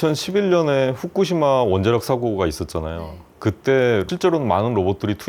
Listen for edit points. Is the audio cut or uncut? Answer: uncut